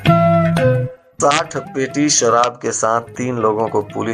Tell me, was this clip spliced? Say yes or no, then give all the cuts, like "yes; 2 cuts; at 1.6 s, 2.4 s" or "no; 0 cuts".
yes; 1 cut; at 1.0 s